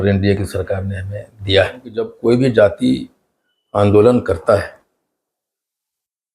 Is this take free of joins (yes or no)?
no